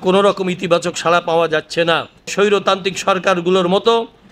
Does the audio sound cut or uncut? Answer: cut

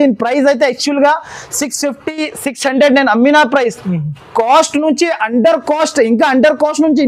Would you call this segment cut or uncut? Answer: uncut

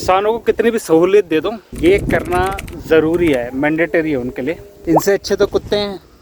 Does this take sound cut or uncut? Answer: cut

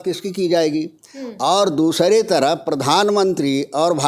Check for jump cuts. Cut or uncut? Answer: uncut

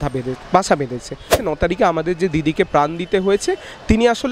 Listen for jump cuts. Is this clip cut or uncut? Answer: cut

